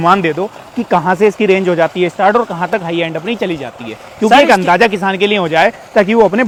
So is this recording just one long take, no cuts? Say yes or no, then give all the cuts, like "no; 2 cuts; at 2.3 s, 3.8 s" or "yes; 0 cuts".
yes; 0 cuts